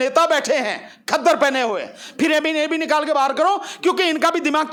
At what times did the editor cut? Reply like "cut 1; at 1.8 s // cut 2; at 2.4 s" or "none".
none